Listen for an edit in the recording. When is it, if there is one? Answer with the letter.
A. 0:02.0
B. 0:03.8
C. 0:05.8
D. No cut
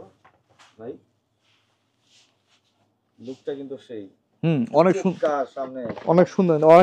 D